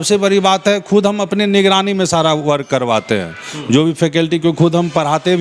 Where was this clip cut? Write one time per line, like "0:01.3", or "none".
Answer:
none